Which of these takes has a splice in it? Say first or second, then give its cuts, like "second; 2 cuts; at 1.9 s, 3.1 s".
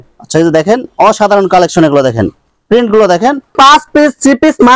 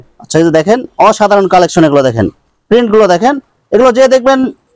first; 1 cut; at 3.5 s